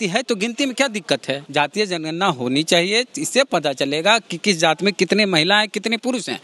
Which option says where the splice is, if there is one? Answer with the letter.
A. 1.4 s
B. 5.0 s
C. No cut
A